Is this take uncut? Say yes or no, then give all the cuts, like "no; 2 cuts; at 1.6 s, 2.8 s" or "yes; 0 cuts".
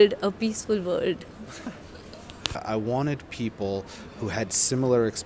no; 1 cut; at 2.6 s